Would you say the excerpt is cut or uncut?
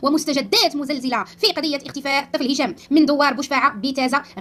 uncut